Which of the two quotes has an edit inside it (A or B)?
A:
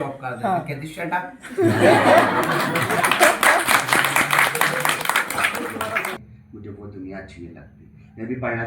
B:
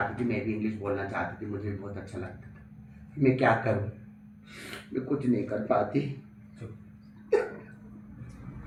A